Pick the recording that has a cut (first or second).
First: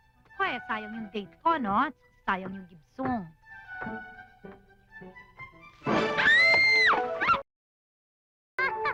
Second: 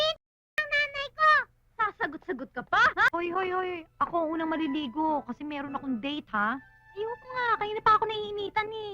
second